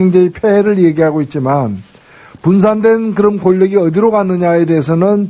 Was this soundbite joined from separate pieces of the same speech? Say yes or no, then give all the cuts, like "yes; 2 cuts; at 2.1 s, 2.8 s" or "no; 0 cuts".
no; 0 cuts